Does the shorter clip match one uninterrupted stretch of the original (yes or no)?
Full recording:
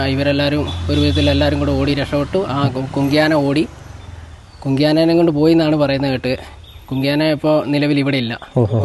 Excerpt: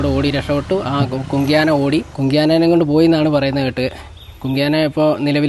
no